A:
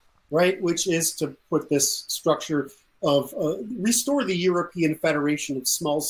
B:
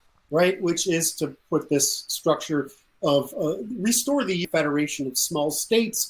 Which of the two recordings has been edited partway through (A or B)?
B